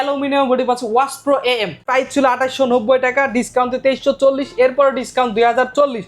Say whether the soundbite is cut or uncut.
cut